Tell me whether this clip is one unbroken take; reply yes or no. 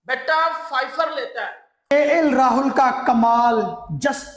no